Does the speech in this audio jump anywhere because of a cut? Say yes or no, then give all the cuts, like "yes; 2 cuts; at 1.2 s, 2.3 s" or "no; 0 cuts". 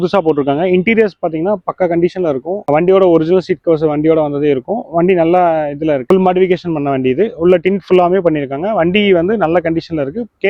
yes; 1 cut; at 6.0 s